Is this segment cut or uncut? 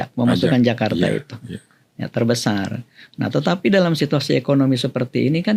uncut